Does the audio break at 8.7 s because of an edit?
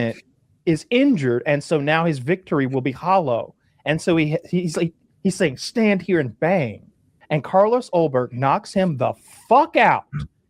no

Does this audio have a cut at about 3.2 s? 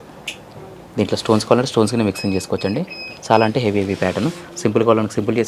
no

